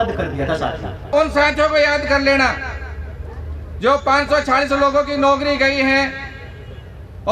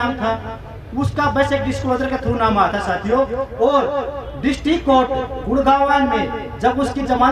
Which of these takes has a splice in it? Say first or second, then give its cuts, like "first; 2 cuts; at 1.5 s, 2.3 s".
first; 1 cut; at 1.1 s